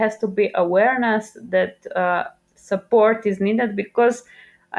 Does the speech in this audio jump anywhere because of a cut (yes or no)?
no